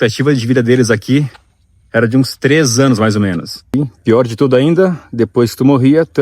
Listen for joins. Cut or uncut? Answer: cut